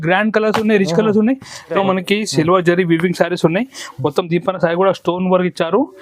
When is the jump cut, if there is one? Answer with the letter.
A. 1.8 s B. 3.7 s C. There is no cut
A